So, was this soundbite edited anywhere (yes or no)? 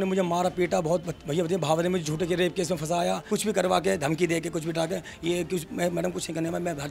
yes